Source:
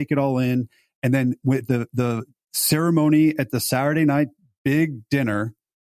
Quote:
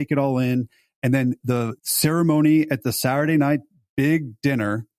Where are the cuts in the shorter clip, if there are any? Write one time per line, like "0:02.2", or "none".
0:01.4